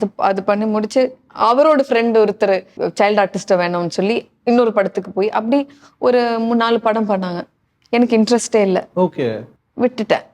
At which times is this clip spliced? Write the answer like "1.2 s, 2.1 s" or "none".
2.8 s